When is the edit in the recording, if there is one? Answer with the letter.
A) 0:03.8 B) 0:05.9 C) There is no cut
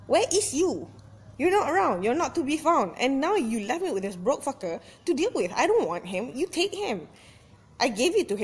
B